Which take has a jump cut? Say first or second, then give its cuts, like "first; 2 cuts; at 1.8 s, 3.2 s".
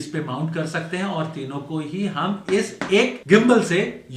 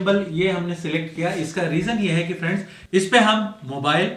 first; 1 cut; at 3.2 s